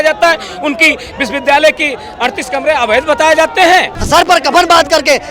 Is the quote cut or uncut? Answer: cut